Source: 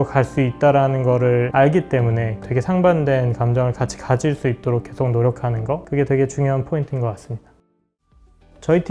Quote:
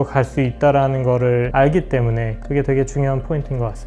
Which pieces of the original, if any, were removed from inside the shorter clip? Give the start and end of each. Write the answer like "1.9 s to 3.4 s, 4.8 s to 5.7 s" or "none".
2.4 s to 5.8 s